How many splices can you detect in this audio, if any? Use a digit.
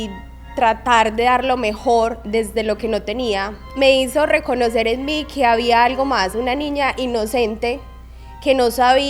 1